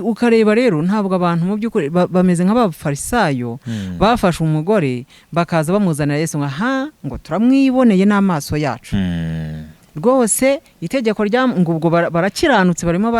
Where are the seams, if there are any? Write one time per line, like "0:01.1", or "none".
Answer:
none